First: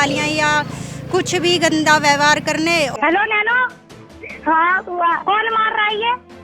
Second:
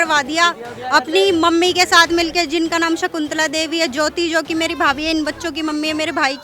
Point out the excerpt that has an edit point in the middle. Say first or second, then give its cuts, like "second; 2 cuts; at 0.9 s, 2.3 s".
first; 1 cut; at 2.9 s